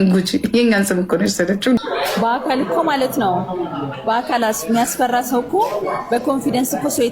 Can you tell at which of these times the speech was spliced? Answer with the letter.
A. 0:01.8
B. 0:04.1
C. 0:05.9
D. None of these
A